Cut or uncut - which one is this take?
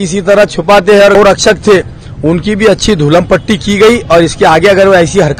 cut